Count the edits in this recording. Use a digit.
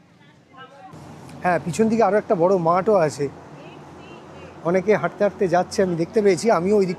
1